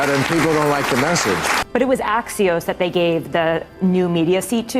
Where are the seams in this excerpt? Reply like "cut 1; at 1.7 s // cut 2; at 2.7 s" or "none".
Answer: cut 1; at 1.6 s